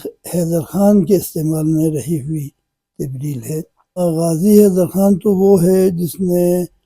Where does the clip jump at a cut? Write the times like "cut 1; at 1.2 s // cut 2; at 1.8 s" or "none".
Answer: none